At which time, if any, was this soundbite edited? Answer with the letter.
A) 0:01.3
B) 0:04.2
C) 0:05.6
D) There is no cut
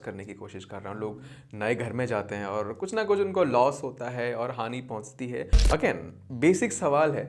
C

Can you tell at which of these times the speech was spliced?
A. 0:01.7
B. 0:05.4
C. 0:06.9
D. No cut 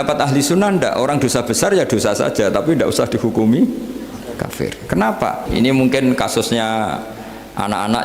B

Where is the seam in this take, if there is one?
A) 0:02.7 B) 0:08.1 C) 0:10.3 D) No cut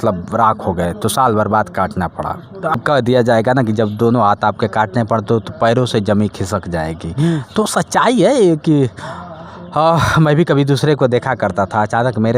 A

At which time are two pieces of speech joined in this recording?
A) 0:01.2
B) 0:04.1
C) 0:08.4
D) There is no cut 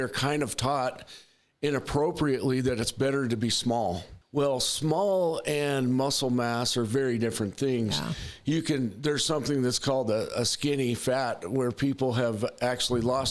B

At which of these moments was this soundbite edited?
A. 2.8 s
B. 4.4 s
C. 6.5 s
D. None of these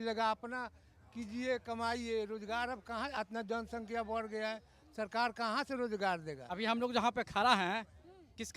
C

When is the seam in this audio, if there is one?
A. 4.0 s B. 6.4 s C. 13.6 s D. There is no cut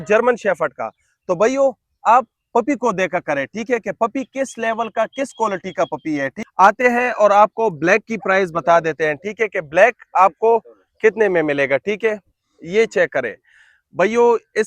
B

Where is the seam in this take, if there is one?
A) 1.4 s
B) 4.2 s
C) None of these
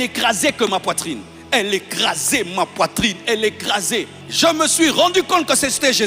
B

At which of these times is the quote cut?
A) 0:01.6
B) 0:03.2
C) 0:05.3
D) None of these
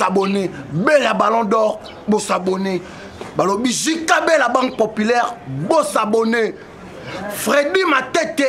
D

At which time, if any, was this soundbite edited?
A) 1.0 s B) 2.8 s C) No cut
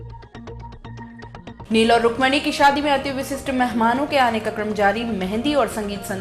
A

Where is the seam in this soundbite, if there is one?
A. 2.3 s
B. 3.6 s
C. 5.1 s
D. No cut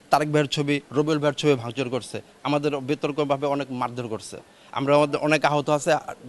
D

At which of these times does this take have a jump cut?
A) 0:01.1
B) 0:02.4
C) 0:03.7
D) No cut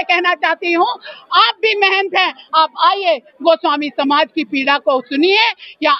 D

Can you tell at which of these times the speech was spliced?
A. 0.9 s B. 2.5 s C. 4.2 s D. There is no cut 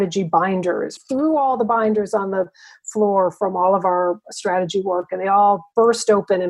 A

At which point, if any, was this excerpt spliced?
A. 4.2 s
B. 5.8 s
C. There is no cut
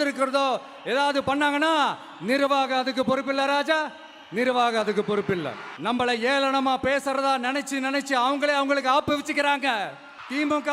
B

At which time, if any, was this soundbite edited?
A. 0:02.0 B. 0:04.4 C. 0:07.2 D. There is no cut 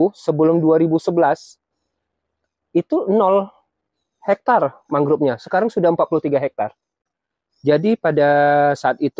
C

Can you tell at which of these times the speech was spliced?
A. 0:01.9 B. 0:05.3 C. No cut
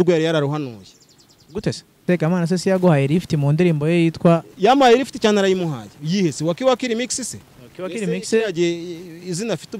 A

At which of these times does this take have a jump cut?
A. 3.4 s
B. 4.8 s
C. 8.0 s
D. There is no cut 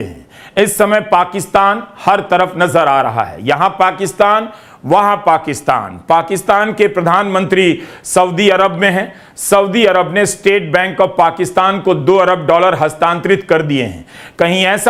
D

